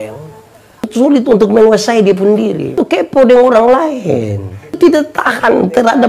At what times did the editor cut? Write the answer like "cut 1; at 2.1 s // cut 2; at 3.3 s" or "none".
cut 1; at 0.8 s // cut 2; at 2.8 s // cut 3; at 4.8 s